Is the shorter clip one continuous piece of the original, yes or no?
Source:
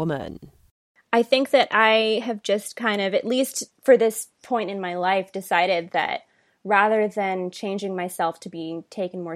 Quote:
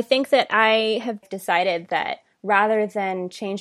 no